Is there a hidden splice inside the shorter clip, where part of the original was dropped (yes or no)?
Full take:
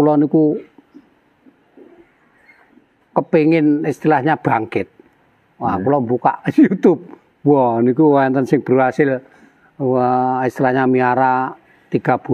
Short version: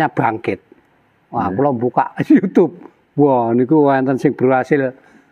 no